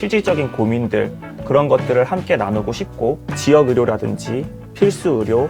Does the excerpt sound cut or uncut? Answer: cut